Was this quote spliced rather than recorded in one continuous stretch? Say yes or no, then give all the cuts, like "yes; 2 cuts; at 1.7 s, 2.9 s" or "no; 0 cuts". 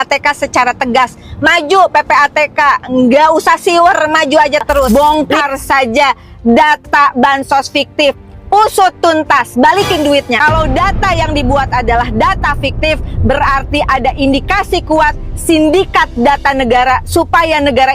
yes; 2 cuts; at 4.9 s, 10.4 s